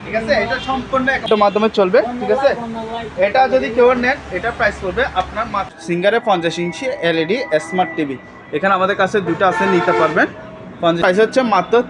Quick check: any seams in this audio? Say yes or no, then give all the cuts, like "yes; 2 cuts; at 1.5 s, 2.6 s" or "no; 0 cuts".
yes; 3 cuts; at 1.3 s, 6.1 s, 11.2 s